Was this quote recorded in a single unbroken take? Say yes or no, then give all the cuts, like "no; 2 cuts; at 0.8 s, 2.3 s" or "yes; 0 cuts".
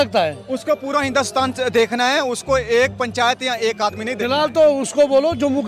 yes; 0 cuts